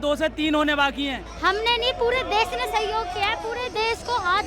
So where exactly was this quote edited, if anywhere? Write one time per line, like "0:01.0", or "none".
0:01.2